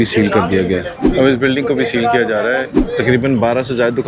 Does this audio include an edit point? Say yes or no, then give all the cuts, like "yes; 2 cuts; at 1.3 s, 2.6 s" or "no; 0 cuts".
yes; 2 cuts; at 1.0 s, 2.7 s